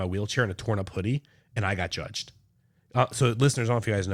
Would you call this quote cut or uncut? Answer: uncut